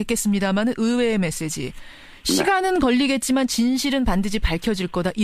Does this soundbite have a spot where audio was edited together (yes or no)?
yes